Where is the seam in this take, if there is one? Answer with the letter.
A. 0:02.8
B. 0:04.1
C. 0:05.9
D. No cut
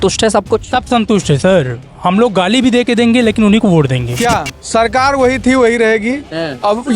B